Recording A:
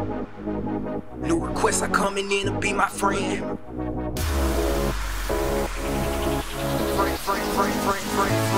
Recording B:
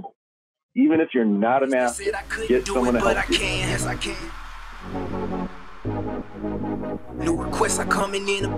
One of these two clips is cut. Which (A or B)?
B